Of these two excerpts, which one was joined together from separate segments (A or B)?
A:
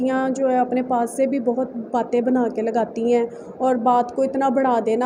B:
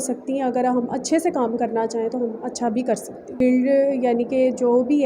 B